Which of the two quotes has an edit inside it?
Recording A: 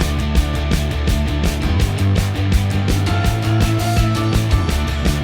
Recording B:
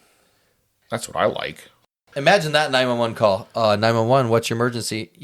B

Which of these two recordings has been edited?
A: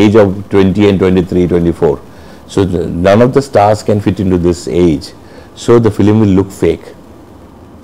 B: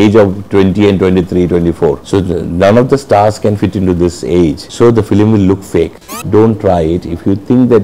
B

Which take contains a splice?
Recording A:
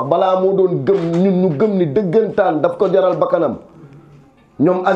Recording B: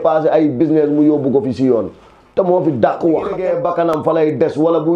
B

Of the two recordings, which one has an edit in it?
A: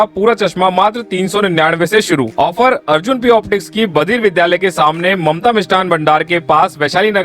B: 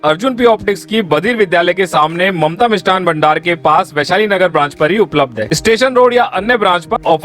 B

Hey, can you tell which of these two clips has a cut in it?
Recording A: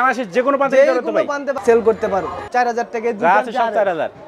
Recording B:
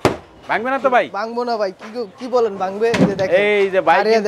A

